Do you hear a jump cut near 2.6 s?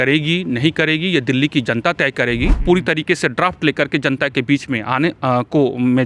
yes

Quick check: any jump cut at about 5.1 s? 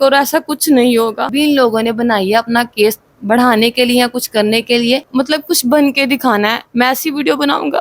yes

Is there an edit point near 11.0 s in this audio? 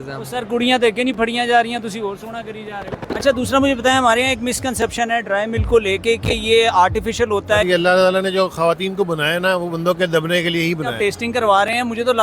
yes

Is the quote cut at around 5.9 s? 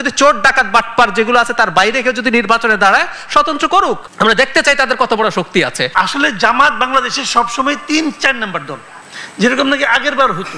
yes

